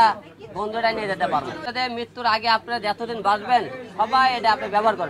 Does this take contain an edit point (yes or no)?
yes